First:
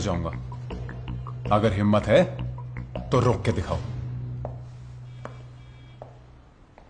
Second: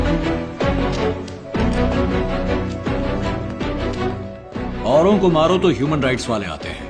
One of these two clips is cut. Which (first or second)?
first